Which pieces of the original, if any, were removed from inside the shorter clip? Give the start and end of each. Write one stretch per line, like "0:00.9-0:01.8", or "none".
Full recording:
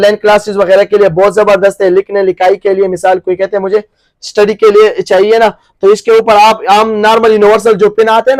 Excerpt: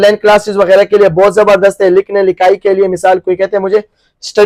none